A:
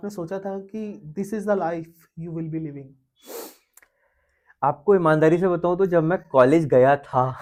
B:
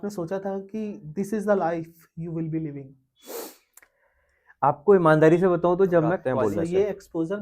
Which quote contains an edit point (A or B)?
B